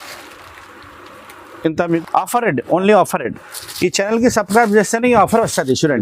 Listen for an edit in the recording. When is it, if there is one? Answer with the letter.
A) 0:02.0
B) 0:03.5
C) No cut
A